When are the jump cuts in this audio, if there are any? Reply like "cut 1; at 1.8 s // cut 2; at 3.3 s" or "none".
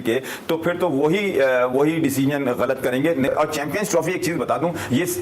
none